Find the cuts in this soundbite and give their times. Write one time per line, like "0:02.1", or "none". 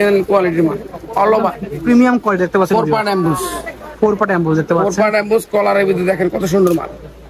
none